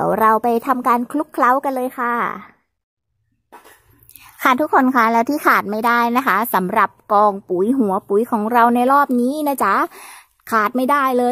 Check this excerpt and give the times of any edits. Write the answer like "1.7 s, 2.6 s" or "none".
2.8 s